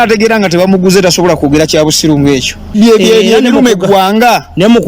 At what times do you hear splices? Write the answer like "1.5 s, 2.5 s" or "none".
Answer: 2.7 s